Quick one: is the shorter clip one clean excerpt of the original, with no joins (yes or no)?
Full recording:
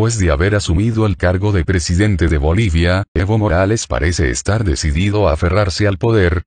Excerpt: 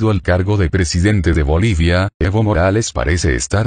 yes